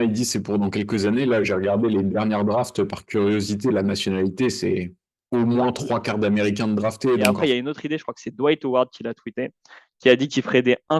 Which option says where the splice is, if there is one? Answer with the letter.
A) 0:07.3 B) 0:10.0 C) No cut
A